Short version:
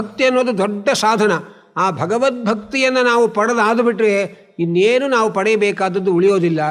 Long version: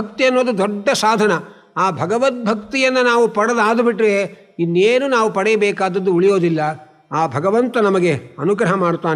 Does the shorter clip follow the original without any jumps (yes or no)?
yes